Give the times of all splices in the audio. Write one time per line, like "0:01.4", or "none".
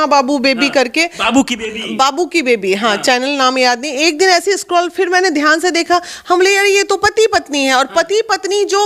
none